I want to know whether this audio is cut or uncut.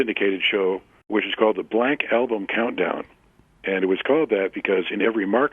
cut